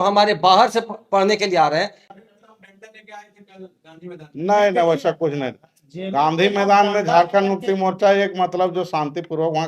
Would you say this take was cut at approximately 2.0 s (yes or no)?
yes